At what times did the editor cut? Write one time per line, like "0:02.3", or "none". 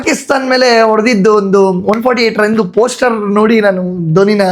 none